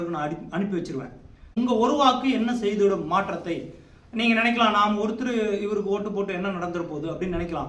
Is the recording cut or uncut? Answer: cut